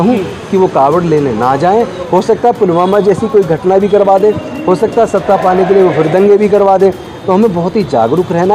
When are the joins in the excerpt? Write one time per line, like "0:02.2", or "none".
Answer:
0:02.0